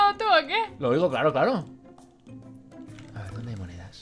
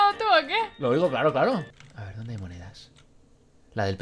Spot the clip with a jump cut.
second; 1 cut; at 1.8 s

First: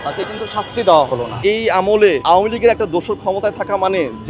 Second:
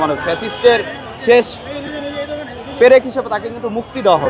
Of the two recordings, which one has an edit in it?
first; 2 cuts; at 1.3 s, 2.2 s

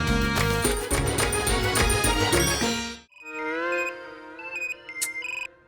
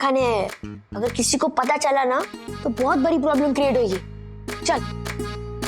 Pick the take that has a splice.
first; 2 cuts; at 0.9 s, 2.8 s

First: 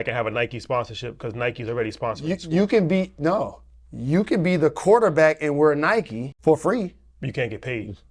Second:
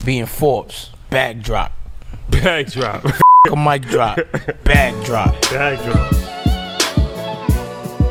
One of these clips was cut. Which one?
first; 1 cut; at 6.2 s

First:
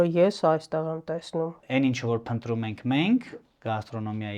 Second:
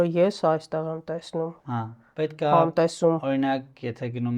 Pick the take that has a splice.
first; 1 cut; at 1.6 s

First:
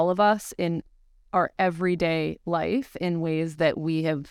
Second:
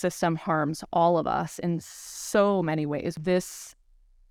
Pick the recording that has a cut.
second; 1 cut; at 3.1 s

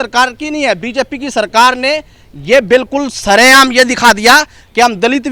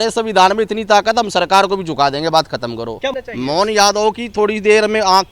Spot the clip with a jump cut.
second; 1 cut; at 3.2 s

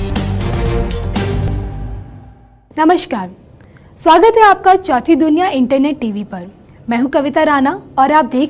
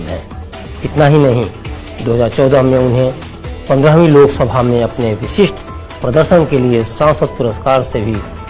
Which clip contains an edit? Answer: first; 1 cut; at 1.5 s

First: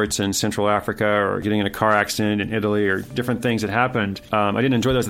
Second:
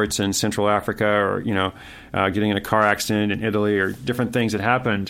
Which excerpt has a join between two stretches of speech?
first; 2 cuts; at 1.4 s, 4.2 s

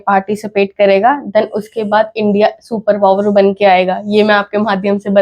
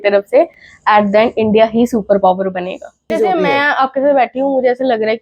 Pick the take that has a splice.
second; 1 cut; at 3.1 s

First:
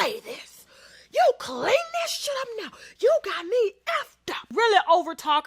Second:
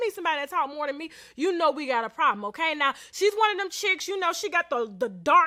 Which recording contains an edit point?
first; 1 cut; at 4.5 s

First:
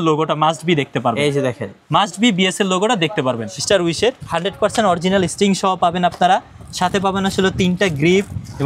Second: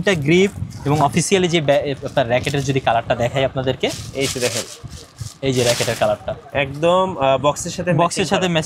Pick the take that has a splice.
first; 1 cut; at 3.5 s

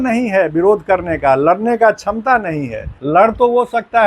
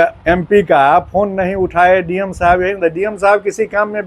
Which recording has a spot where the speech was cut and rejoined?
first; 1 cut; at 3.0 s

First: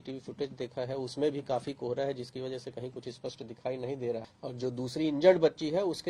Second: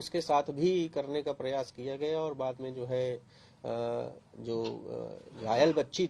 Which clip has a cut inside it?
first; 1 cut; at 4.3 s

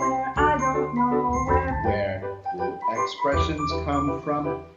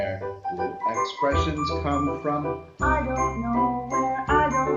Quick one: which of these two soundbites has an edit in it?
first; 1 cut; at 2.3 s

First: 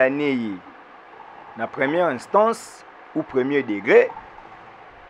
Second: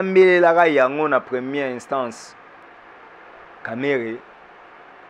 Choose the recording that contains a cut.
second; 1 cut; at 2.6 s

